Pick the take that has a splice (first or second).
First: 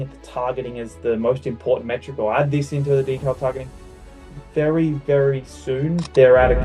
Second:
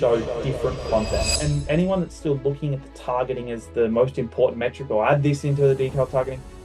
second